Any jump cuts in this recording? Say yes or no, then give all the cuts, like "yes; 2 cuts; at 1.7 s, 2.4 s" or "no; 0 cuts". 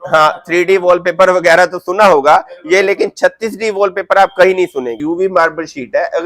yes; 1 cut; at 5.0 s